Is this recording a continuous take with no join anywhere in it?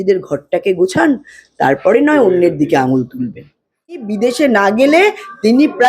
no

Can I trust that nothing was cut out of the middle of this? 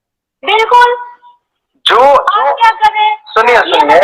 yes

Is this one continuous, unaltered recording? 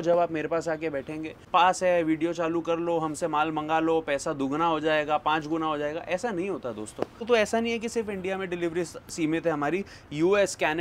no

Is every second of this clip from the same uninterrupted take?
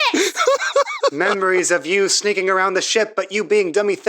no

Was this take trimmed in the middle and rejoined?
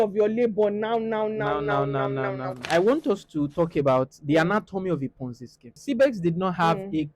yes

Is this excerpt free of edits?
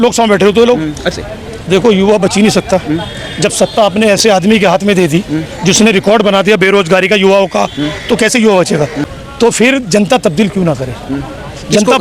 no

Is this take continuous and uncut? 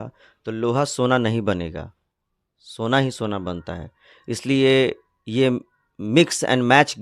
yes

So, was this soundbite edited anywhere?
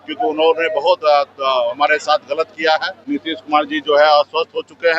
yes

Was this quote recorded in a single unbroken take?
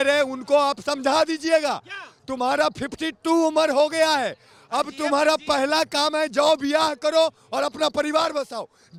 yes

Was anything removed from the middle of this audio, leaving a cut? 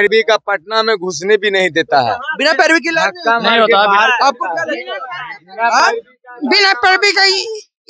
no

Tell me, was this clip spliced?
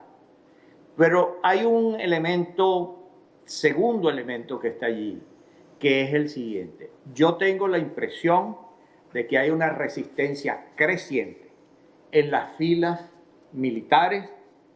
no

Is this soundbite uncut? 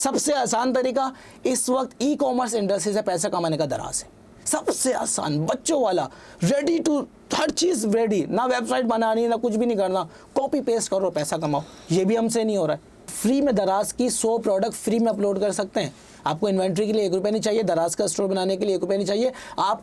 no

